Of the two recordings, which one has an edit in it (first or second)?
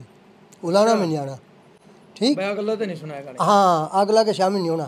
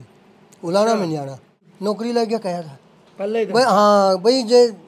second